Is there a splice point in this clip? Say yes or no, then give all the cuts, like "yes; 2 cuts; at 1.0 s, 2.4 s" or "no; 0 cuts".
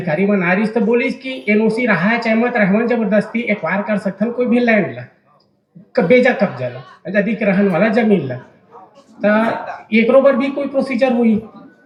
no; 0 cuts